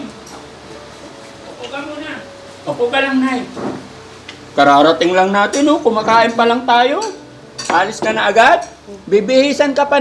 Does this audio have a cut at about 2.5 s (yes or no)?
yes